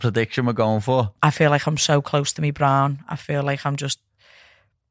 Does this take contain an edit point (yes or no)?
yes